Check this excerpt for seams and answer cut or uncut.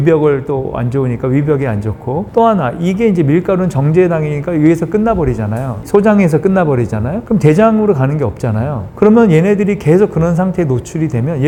uncut